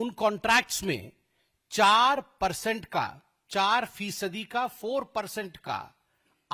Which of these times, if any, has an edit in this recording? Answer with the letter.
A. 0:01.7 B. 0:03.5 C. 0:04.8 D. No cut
D